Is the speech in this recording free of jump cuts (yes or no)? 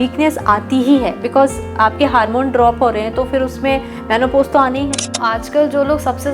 no